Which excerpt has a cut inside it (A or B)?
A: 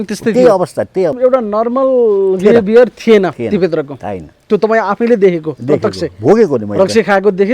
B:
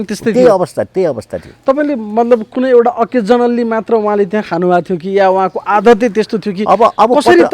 A